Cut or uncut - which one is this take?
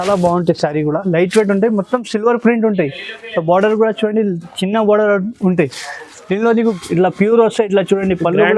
cut